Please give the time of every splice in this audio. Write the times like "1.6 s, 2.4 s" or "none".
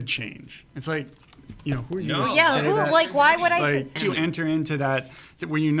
4.0 s